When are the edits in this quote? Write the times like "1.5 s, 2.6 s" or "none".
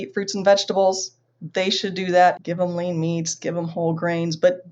2.4 s